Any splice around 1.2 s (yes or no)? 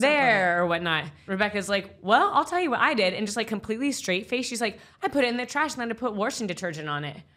yes